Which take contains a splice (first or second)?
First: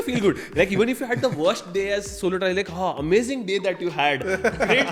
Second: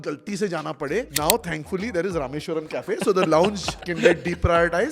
second